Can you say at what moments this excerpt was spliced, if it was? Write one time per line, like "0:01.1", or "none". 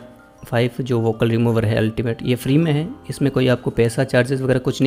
none